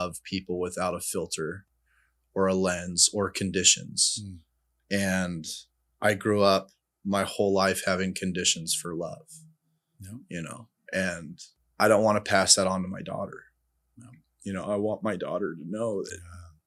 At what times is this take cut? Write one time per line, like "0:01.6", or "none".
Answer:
none